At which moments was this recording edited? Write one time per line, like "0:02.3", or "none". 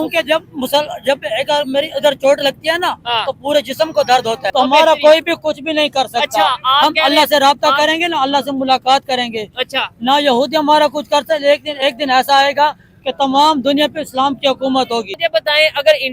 0:04.4
0:15.1